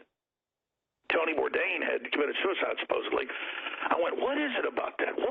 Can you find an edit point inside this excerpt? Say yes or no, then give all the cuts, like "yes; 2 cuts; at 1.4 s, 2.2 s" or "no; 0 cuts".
no; 0 cuts